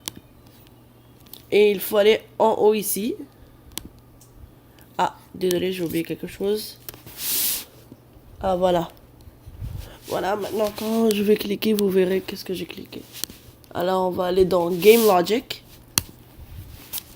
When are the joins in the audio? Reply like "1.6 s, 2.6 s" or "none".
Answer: 7.9 s